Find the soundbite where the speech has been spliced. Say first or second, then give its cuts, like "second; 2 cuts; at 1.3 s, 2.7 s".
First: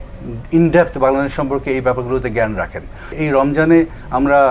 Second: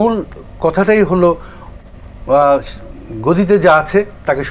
first; 1 cut; at 3.2 s